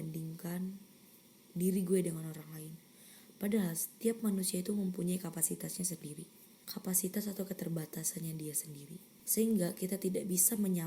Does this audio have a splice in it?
no; 0 cuts

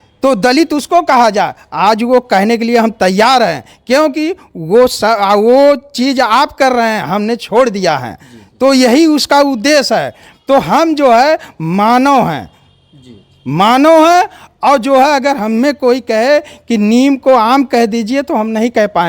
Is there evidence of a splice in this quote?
no; 0 cuts

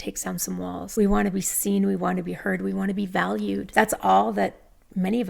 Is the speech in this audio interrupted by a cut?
yes; 2 cuts; at 0.9 s, 3.7 s

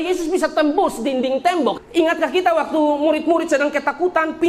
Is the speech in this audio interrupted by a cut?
yes; 1 cut; at 1.8 s

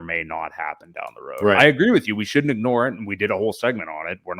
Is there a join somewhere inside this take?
no; 0 cuts

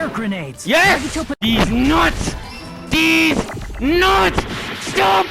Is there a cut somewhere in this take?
yes; 1 cut; at 1.3 s

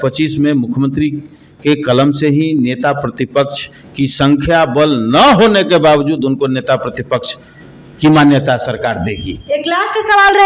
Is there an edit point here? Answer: no; 0 cuts

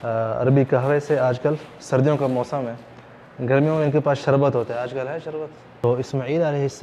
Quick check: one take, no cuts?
no; 1 cut; at 5.8 s

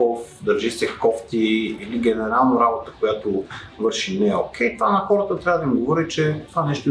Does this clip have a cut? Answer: no; 0 cuts

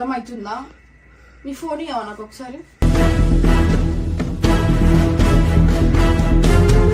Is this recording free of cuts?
yes; 0 cuts

